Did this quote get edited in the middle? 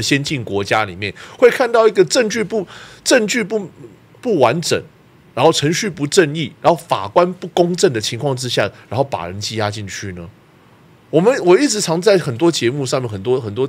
no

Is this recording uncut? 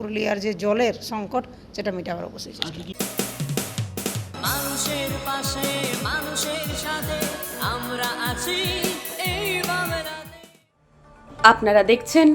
no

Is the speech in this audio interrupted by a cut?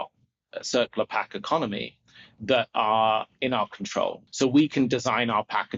yes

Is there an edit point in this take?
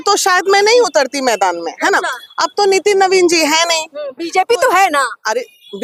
no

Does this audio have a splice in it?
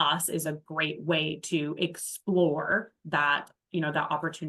no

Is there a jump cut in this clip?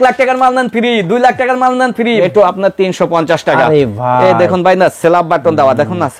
yes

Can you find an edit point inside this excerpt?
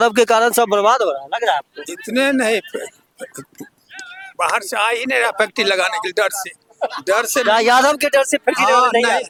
no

